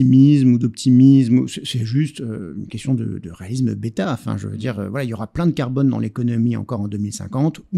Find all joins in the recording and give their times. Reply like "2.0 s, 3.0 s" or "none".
none